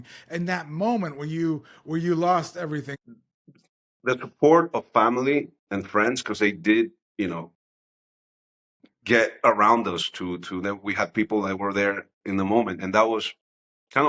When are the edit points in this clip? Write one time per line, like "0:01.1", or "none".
0:02.9